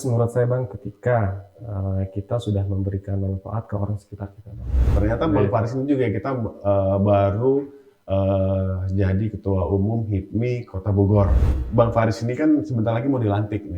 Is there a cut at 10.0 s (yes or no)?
no